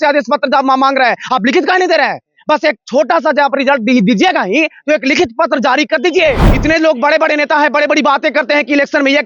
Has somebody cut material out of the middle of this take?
no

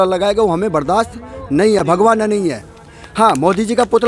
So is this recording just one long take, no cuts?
yes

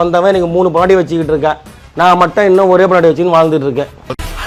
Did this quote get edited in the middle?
no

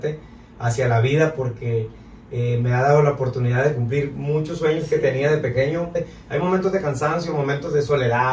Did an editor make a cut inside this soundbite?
yes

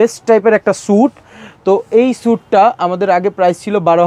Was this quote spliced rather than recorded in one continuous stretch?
no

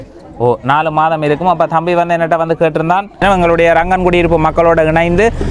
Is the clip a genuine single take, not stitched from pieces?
no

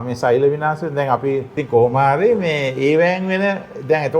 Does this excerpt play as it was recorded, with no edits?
no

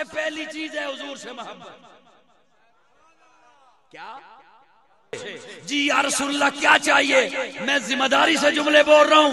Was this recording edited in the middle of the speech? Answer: yes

